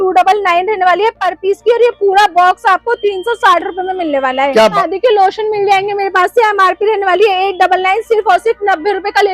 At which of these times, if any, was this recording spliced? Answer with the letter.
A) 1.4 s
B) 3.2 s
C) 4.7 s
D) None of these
C